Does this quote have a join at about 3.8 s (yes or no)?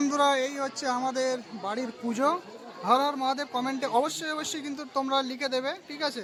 no